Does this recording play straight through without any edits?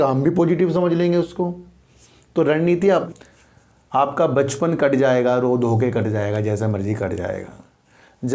no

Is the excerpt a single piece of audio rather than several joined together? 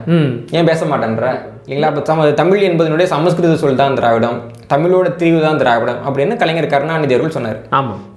no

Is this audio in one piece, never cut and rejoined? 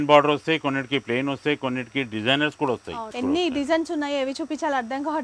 no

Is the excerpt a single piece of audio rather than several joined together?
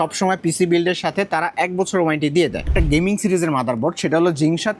no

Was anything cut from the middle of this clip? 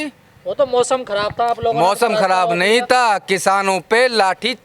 no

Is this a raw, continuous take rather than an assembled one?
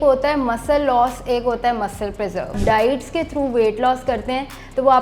no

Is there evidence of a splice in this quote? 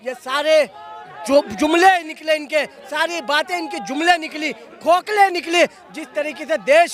no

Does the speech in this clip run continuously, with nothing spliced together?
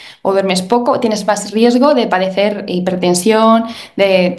yes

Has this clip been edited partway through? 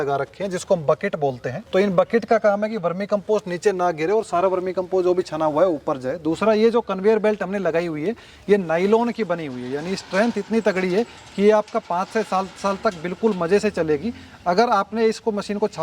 no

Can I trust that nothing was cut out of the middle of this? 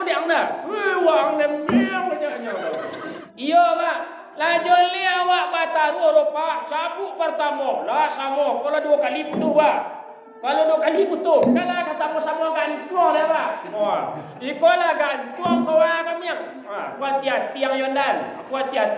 no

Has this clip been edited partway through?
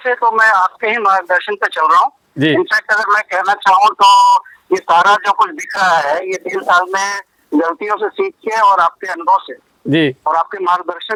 no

